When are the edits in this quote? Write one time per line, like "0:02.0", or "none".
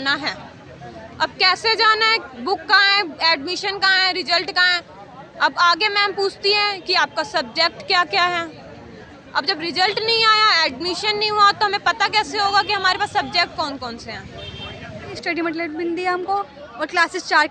0:15.2